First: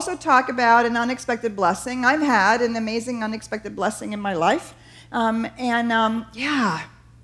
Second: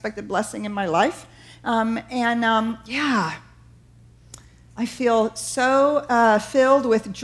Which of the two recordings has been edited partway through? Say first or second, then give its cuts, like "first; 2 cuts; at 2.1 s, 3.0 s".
second; 1 cut; at 4.9 s